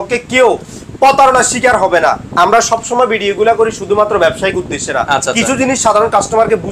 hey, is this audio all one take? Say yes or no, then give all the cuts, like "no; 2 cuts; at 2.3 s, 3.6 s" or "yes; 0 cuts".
yes; 0 cuts